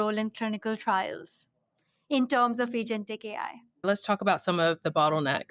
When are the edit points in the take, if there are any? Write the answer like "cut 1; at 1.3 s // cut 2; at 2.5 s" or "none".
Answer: cut 1; at 3.8 s